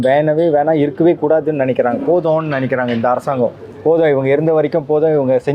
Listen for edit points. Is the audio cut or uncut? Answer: uncut